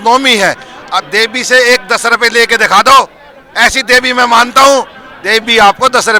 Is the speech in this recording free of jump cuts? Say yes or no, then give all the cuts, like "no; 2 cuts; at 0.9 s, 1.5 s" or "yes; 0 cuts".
yes; 0 cuts